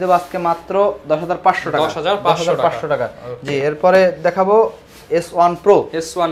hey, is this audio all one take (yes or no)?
yes